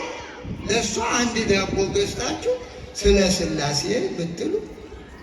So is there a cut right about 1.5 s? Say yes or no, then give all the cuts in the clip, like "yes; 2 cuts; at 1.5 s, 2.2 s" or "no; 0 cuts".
no; 0 cuts